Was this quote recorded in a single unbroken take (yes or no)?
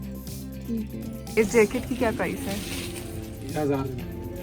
no